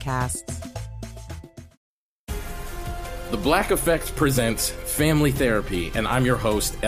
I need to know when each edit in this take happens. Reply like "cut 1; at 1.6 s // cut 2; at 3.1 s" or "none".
cut 1; at 1.7 s